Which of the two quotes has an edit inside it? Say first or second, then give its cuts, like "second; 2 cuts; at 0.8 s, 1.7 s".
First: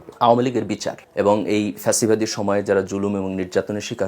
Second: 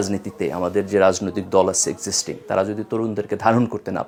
first; 1 cut; at 1.0 s